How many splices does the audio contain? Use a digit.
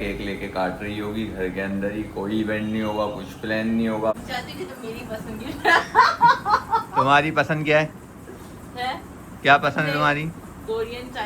1